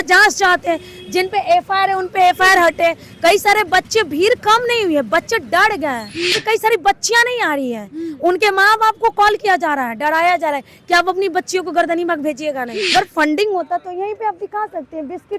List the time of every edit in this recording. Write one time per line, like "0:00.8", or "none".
0:06.4
0:12.9

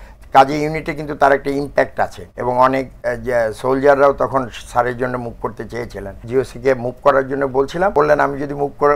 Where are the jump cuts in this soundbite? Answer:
0:06.2
0:07.9

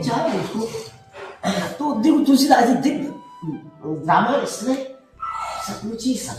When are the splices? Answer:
none

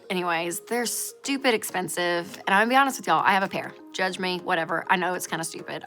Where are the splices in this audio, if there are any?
0:03.8

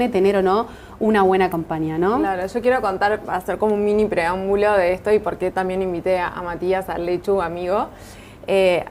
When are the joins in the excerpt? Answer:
none

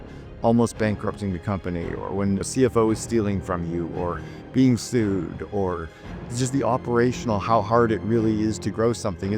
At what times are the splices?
0:02.5

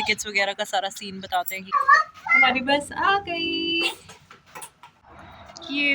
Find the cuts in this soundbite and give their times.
none

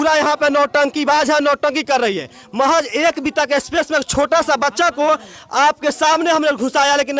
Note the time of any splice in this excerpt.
none

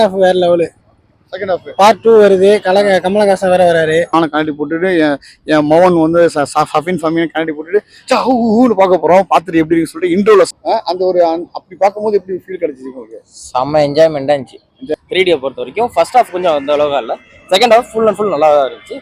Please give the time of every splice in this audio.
0:04.1
0:10.6
0:14.9

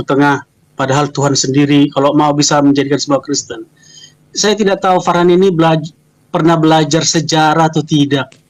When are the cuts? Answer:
none

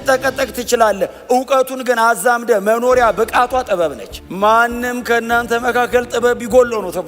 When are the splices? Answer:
0:04.1

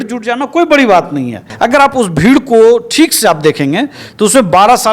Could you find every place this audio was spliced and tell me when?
0:01.4

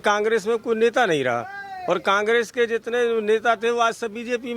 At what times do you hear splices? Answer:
none

